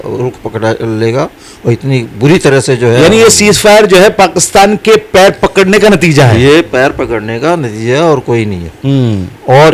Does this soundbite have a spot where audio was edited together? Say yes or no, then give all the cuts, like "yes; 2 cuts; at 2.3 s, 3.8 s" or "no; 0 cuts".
no; 0 cuts